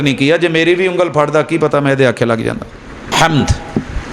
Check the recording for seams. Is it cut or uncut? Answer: cut